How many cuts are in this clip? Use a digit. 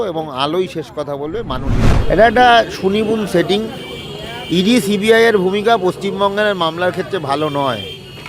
1